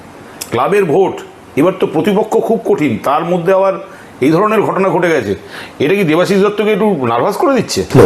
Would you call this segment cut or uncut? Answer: uncut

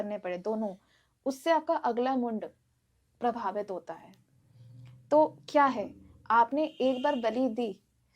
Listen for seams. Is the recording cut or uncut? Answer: uncut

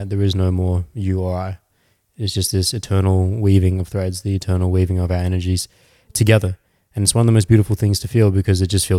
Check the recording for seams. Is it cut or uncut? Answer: uncut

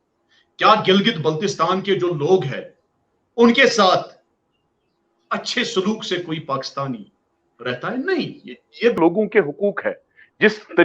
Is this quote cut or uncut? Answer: cut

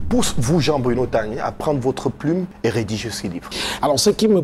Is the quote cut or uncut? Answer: cut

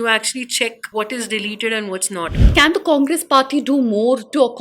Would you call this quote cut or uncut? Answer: cut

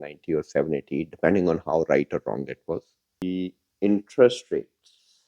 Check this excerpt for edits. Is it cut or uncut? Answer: cut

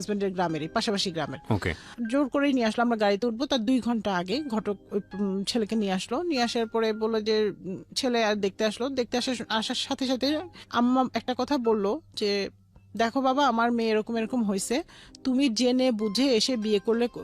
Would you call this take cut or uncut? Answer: uncut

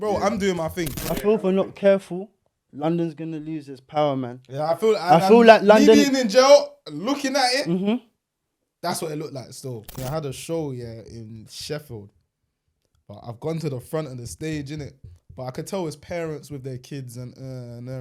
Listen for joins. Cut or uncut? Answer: cut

